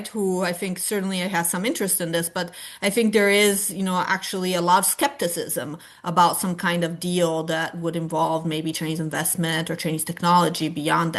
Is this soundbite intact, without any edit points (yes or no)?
yes